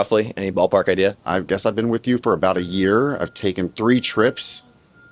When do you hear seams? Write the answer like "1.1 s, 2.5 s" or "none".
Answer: 1.2 s